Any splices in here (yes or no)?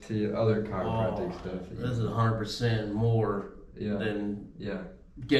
no